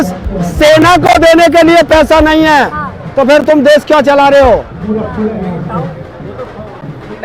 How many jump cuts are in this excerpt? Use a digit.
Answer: 0